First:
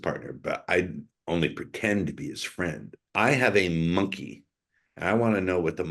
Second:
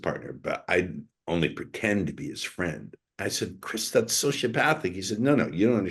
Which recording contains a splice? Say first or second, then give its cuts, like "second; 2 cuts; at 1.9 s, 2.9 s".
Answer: first; 1 cut; at 2.9 s